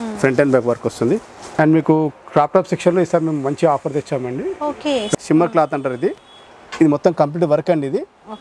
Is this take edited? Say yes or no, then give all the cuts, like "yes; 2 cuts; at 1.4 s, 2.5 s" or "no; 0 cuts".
yes; 2 cuts; at 1.4 s, 5.1 s